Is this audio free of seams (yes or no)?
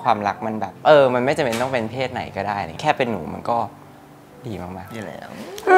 yes